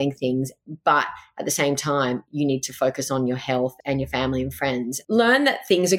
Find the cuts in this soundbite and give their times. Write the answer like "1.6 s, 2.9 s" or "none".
3.8 s, 5.0 s